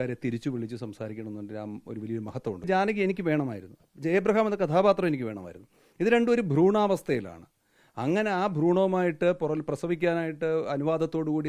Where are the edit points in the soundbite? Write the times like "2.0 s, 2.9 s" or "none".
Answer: 2.7 s